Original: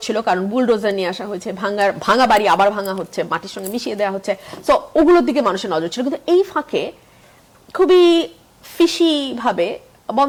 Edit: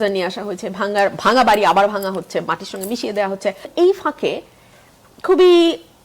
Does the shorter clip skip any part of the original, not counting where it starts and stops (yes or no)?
yes